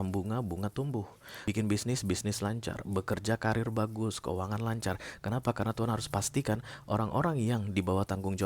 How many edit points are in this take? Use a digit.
1